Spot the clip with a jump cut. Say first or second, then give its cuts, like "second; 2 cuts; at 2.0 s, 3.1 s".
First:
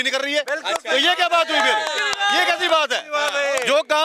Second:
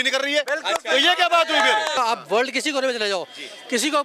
second; 1 cut; at 2.0 s